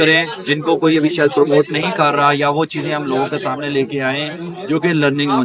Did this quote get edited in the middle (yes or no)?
no